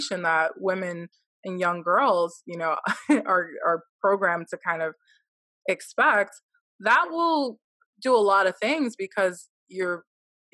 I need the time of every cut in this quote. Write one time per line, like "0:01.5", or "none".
0:07.7